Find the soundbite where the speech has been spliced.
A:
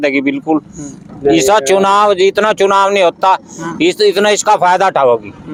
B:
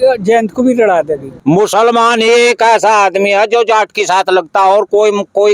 B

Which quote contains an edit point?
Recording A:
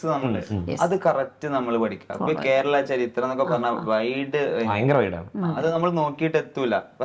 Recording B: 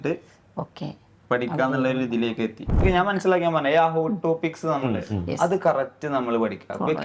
B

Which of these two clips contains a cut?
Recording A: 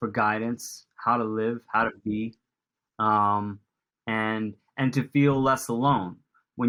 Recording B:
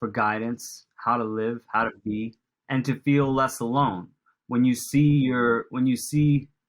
B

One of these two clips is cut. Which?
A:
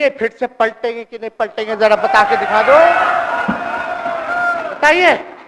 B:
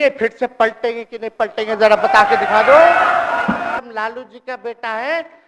B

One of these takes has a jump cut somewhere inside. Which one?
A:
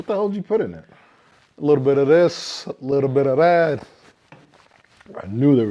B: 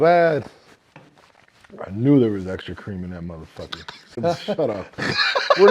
B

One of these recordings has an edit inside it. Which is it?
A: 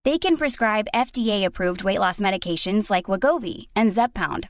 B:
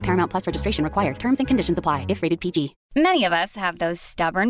B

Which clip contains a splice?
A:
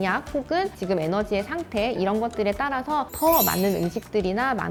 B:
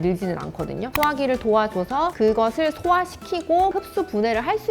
B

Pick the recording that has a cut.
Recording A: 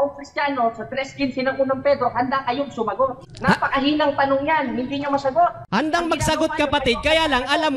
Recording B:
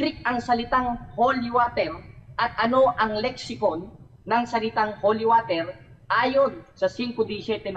A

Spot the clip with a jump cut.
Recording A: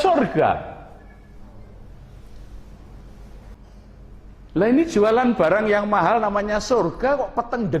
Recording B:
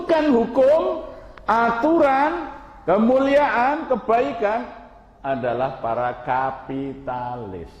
A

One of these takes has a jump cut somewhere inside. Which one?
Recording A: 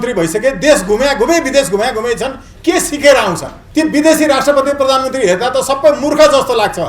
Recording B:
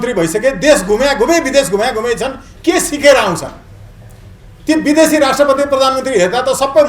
A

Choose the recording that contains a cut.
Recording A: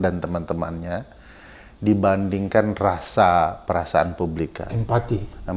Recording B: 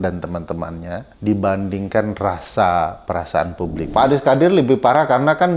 B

